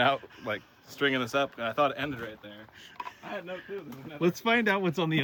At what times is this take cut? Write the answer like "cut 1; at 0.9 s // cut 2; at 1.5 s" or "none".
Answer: none